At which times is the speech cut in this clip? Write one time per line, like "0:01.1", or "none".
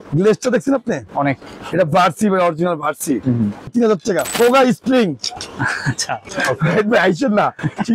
0:03.9
0:06.3